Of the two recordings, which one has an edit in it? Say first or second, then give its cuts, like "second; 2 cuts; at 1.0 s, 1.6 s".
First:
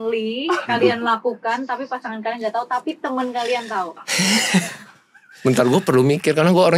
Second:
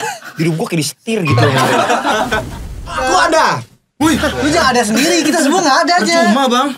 second; 1 cut; at 3.0 s